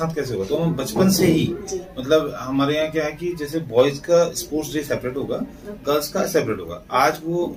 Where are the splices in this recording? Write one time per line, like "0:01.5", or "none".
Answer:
none